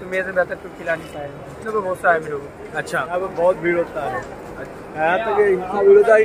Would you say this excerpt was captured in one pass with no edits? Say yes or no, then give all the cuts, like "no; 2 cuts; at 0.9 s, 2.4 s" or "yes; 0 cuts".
no; 2 cuts; at 1.5 s, 3.0 s